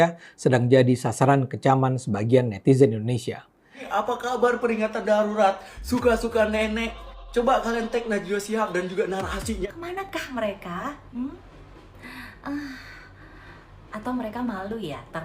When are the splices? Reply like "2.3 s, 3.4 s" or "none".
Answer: 3.8 s, 9.7 s